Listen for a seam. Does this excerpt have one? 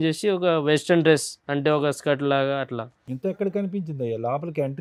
no; 0 cuts

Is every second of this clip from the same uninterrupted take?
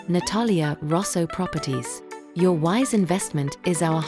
yes; 0 cuts

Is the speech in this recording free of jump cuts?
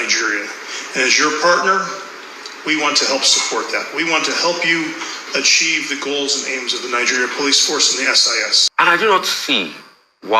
no; 1 cut; at 8.6 s

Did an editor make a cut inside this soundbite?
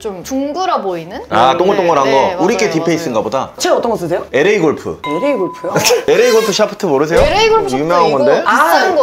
yes; 1 cut; at 6.0 s

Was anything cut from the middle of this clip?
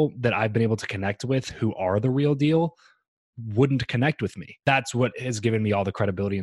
yes; 1 cut; at 4.5 s

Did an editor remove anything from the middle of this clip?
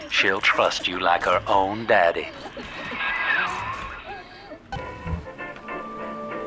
yes; 1 cut; at 4.8 s

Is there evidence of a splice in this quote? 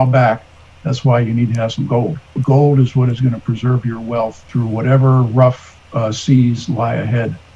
yes; 2 cuts; at 2.4 s, 4.5 s

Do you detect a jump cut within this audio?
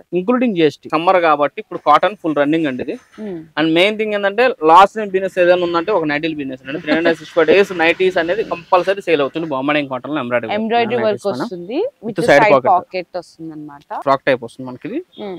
yes; 3 cuts; at 0.8 s, 9.3 s, 14.0 s

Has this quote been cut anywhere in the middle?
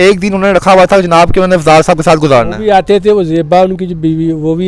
no; 0 cuts

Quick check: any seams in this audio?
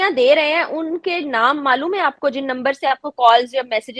no; 0 cuts

